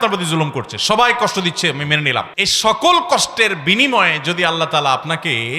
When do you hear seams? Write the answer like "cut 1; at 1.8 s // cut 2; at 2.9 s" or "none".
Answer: cut 1; at 2.4 s